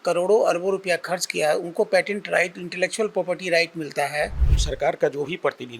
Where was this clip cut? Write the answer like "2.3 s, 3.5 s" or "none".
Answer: 4.5 s